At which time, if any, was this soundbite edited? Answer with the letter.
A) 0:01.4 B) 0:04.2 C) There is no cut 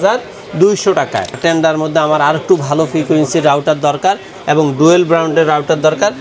A